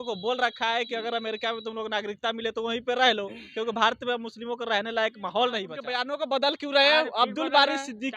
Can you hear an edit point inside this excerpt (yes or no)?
yes